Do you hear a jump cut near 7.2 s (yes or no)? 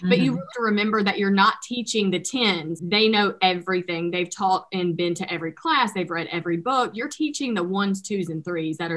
no